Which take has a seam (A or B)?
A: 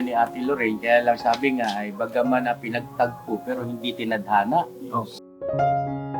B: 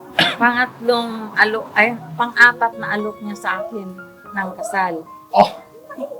A